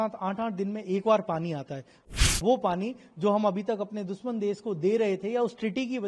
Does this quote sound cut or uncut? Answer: cut